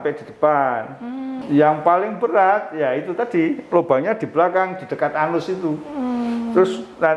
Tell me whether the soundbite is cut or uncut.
cut